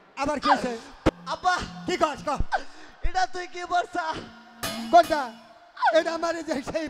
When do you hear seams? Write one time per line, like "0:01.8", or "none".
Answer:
0:01.1